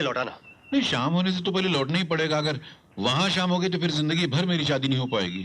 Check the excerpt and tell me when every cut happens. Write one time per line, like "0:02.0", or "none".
none